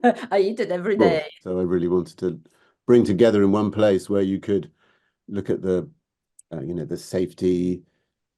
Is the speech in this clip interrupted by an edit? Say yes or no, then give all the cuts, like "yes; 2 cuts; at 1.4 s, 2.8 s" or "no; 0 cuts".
yes; 1 cut; at 1.5 s